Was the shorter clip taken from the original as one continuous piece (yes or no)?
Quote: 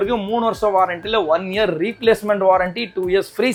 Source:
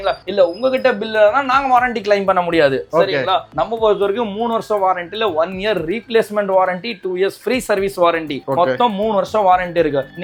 yes